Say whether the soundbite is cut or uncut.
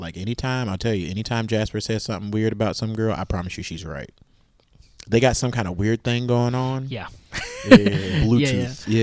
uncut